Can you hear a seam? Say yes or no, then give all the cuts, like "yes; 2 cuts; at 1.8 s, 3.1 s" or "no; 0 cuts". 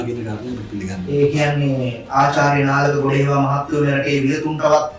no; 0 cuts